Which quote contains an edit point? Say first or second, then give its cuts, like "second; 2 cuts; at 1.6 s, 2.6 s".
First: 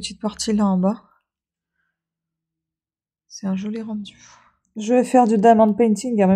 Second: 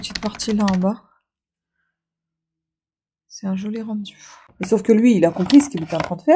second; 1 cut; at 4.5 s